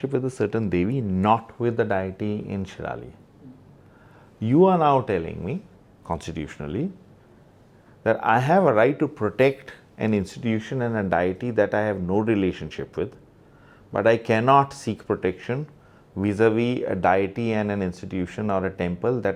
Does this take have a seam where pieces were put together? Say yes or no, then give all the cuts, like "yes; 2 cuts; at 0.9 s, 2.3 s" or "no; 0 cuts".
no; 0 cuts